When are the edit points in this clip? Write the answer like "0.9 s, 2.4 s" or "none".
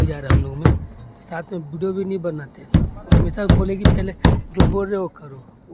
2.6 s